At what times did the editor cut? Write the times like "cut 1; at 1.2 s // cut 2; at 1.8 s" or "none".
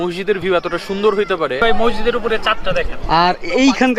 cut 1; at 1.6 s